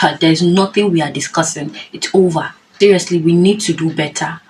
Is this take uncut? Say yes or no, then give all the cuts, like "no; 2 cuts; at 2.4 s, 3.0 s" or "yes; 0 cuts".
no; 1 cut; at 2.6 s